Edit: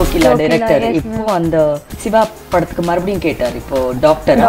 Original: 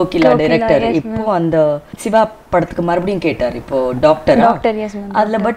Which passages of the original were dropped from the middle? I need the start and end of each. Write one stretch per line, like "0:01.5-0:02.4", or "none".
none